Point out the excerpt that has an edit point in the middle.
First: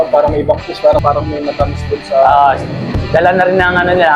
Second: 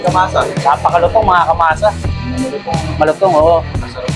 first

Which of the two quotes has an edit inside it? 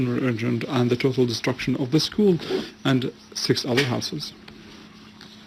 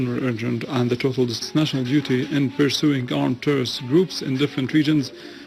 first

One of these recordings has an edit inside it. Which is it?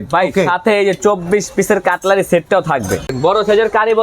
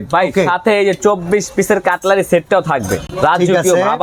first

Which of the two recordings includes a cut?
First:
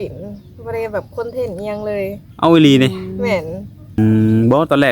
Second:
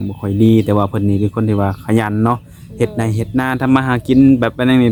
first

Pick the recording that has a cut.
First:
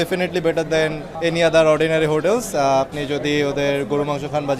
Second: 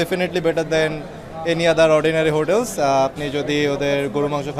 first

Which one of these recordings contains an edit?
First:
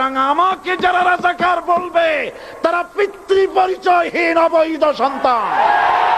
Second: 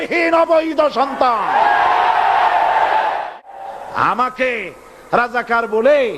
second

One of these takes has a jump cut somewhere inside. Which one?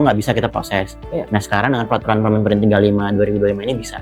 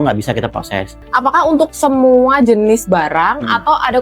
second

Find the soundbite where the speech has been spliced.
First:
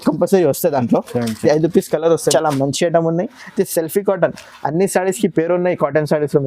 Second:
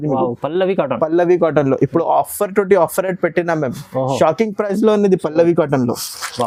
first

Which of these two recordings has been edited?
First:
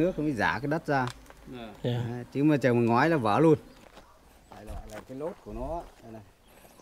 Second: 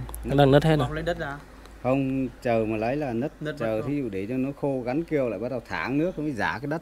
first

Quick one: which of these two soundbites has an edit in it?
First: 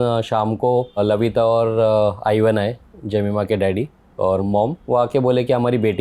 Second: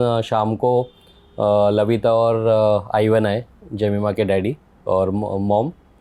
first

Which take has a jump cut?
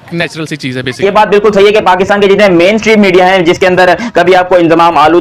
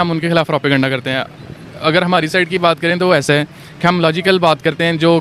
first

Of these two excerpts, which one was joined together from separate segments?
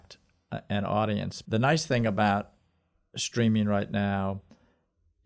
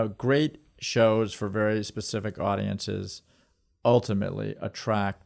first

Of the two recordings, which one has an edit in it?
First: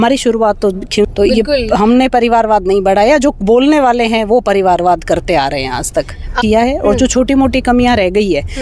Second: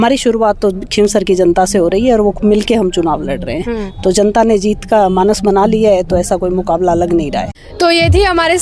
first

